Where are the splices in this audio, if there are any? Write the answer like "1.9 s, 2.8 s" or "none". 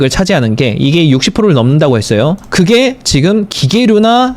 2.4 s